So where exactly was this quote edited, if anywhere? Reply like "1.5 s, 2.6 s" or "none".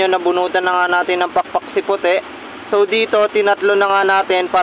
none